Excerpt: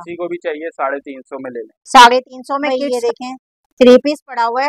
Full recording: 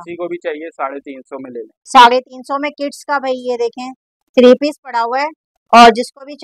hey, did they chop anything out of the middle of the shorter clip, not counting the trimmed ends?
yes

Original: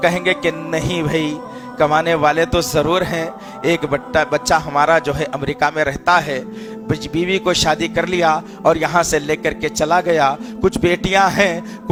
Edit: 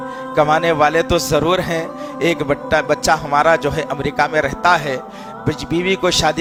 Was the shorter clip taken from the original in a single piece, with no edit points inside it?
yes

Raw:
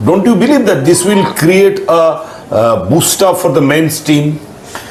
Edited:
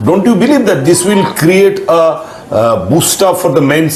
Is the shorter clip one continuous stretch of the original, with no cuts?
yes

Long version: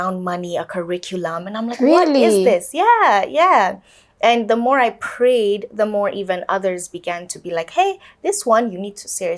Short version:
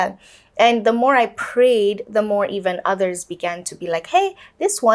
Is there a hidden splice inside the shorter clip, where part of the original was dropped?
no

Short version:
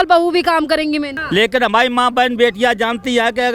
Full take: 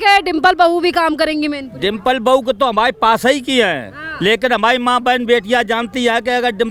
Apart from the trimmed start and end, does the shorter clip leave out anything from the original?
yes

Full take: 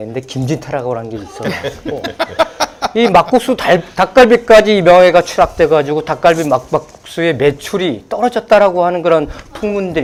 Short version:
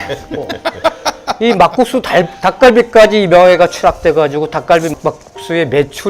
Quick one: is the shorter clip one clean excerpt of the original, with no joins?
no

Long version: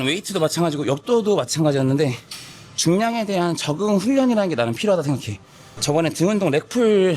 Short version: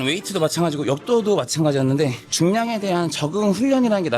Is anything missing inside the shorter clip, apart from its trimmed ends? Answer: yes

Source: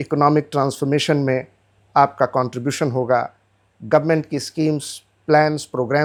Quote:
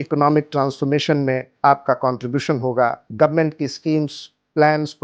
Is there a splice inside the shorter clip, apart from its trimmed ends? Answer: yes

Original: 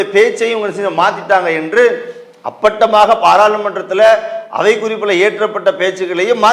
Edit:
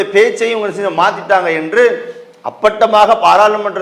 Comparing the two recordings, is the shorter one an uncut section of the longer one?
yes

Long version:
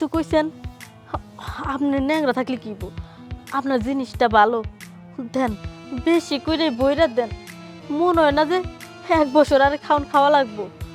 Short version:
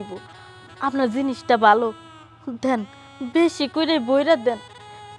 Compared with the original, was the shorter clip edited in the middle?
no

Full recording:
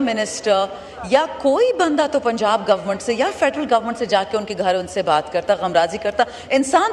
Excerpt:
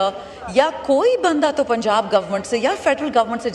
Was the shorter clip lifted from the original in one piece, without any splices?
yes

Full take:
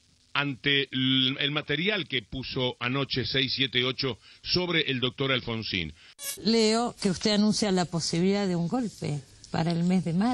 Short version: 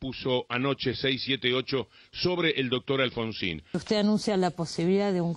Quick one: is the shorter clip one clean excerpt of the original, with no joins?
no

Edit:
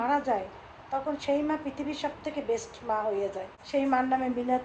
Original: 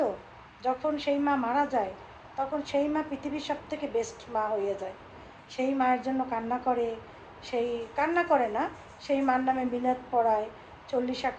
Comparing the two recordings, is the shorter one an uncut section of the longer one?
no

